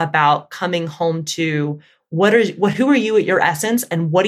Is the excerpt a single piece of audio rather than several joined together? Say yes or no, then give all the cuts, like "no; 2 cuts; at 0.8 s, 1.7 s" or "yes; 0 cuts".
yes; 0 cuts